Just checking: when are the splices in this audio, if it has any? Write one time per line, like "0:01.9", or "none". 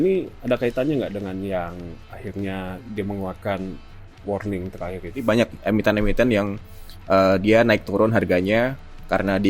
0:05.2